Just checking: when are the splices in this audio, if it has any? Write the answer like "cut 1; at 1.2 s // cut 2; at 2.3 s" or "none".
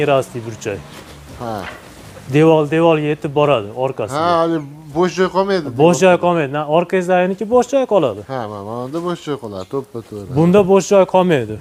none